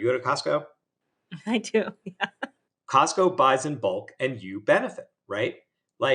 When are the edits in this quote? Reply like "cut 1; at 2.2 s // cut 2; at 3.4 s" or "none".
cut 1; at 2.6 s